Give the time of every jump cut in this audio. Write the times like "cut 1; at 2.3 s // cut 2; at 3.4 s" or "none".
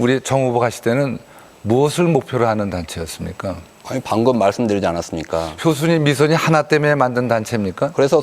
cut 1; at 1.8 s